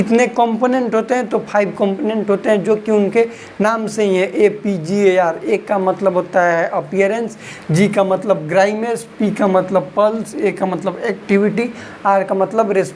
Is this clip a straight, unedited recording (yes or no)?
yes